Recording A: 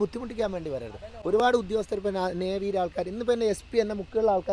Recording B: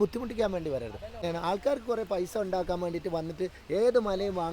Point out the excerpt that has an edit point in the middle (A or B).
B